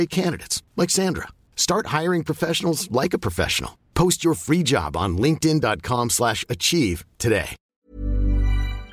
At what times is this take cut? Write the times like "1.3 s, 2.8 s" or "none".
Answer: 7.8 s